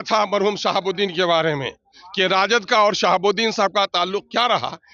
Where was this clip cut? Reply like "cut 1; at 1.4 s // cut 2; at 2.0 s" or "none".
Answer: none

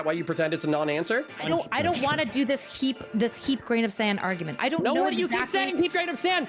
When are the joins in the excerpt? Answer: cut 1; at 1.4 s

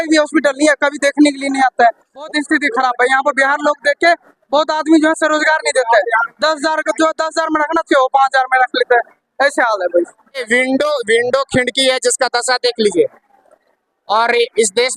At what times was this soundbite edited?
cut 1; at 2.3 s // cut 2; at 10.5 s

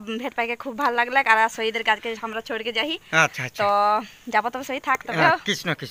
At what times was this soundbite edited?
none

